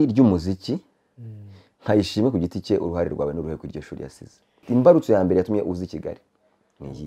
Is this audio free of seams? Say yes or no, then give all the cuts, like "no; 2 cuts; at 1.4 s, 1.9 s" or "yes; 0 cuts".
no; 1 cut; at 4.6 s